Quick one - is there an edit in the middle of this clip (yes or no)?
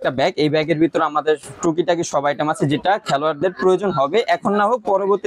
no